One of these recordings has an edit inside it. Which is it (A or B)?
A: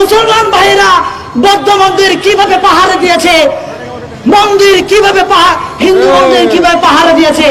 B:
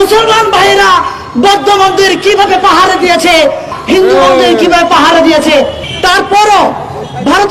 B